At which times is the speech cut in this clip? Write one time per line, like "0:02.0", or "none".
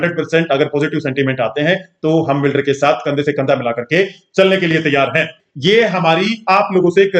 0:05.4